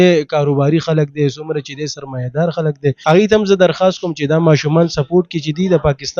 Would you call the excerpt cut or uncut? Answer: cut